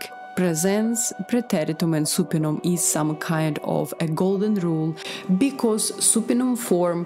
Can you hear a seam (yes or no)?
yes